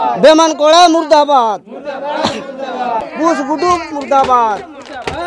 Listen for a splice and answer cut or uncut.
cut